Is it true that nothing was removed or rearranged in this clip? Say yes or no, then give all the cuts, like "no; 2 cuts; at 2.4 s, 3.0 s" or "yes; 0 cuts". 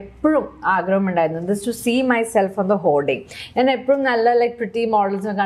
yes; 0 cuts